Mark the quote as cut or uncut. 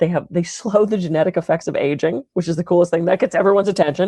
uncut